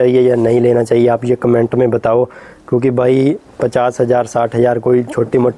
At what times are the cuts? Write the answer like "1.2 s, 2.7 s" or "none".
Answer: none